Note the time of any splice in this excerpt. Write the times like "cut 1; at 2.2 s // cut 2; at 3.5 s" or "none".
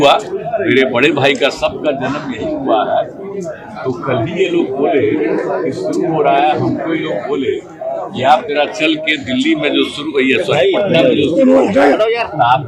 none